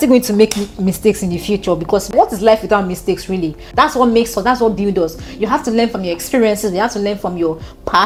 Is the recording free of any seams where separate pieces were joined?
yes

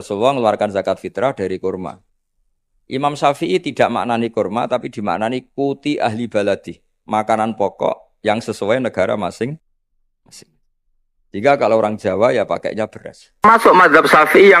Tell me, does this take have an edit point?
yes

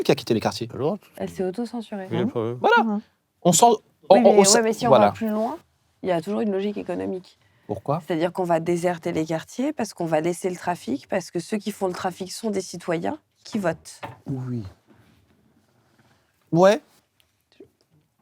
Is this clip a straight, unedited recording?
yes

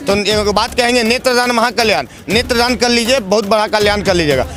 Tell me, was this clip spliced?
no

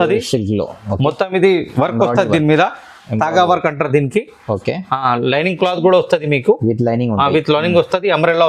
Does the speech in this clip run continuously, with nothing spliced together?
yes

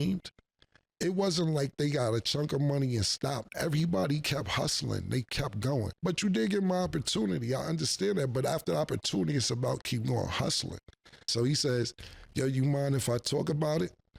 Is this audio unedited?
no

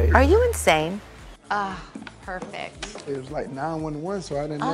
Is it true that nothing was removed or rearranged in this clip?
no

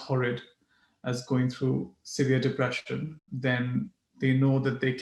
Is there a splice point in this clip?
yes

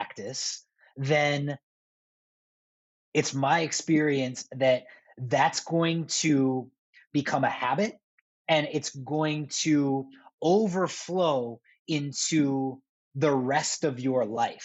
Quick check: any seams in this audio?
no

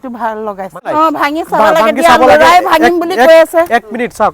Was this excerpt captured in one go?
no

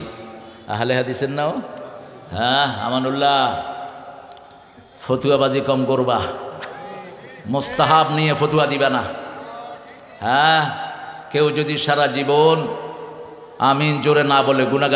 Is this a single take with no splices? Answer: yes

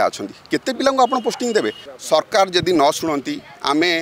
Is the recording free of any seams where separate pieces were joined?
no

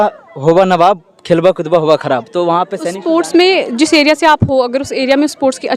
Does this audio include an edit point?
yes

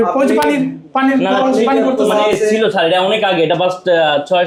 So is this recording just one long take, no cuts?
yes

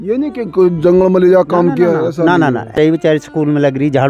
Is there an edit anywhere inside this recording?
yes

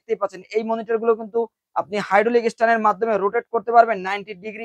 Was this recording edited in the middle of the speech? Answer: no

